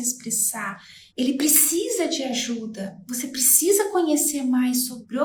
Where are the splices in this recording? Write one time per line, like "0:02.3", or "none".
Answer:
none